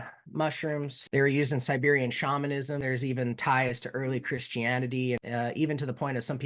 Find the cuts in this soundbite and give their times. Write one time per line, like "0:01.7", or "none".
0:00.9
0:02.8
0:05.2